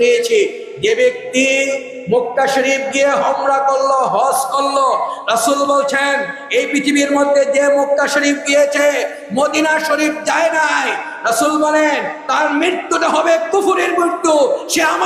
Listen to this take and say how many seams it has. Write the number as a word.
zero